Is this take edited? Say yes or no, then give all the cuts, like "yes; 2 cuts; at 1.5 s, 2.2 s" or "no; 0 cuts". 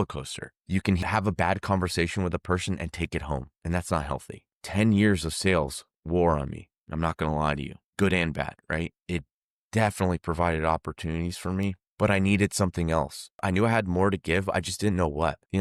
no; 0 cuts